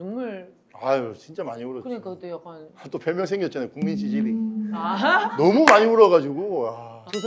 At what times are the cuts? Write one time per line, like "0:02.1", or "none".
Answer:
none